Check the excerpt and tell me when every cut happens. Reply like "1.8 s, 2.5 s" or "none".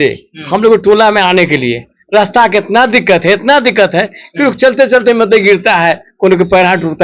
none